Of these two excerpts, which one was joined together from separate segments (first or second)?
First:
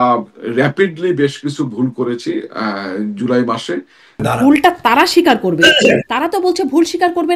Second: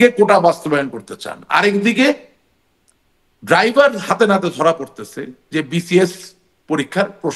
first